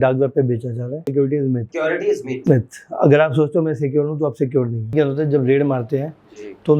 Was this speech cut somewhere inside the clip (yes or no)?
yes